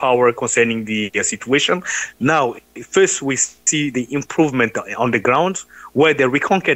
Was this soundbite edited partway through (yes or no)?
no